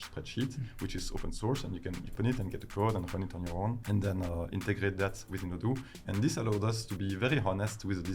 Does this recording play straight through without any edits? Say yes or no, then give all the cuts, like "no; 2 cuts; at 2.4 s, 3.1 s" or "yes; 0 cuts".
no; 2 cuts; at 2.1 s, 3.8 s